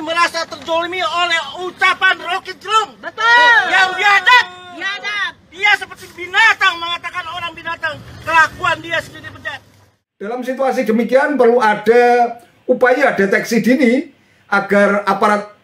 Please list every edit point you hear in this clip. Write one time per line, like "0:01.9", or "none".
0:10.2